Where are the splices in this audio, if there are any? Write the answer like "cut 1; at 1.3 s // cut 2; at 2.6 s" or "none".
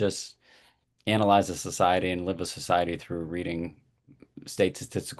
none